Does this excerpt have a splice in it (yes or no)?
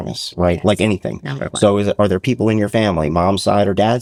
no